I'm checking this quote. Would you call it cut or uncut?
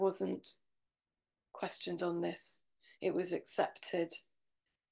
uncut